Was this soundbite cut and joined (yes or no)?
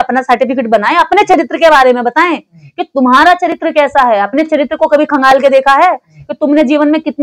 no